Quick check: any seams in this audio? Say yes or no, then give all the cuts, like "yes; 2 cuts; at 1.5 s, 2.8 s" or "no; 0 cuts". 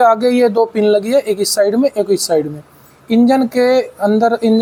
no; 0 cuts